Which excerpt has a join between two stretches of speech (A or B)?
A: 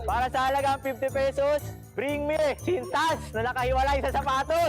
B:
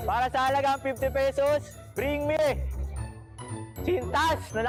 A